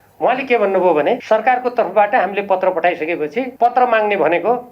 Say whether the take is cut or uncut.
cut